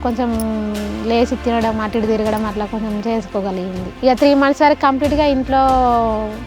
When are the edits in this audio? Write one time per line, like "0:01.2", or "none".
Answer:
0:03.9